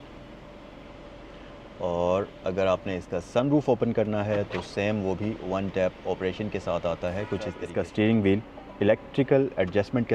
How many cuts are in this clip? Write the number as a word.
one